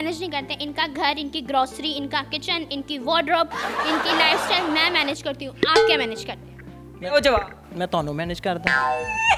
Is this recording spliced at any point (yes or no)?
no